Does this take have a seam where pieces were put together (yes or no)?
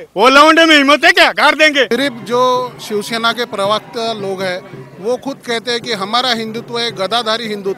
yes